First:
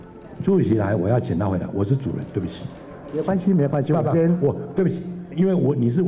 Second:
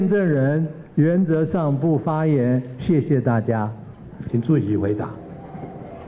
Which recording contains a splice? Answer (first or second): second